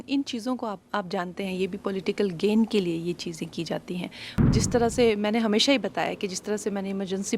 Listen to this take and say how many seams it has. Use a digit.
1